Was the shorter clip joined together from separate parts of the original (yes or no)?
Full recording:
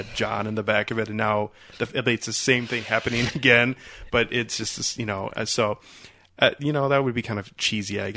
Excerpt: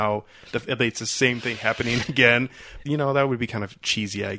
yes